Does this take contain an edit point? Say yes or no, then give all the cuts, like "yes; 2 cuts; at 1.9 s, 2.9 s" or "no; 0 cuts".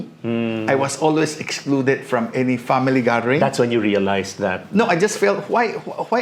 no; 0 cuts